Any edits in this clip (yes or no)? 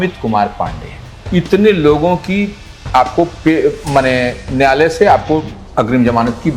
no